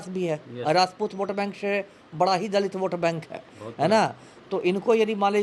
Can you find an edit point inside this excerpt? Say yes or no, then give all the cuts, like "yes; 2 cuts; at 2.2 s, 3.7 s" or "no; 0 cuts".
no; 0 cuts